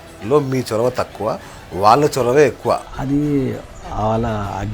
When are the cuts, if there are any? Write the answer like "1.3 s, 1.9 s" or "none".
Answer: 2.9 s